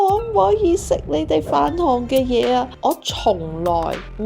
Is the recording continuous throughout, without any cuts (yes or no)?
no